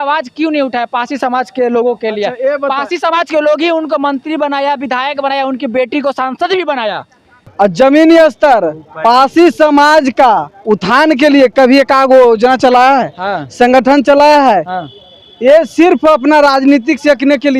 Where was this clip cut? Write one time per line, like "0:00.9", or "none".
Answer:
0:07.5